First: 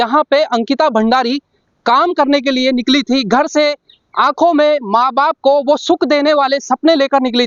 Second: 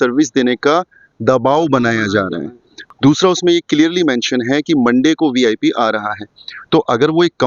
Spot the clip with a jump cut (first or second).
second